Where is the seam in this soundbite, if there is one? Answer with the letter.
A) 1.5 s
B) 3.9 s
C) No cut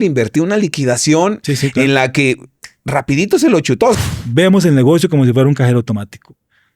B